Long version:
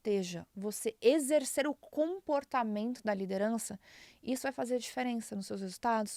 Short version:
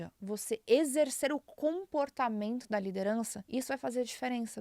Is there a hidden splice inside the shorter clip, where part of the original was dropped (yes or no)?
yes